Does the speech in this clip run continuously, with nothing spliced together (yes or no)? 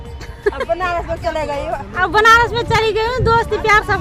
yes